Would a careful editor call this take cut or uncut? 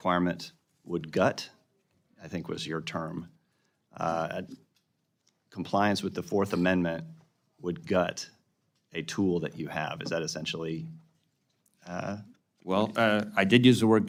uncut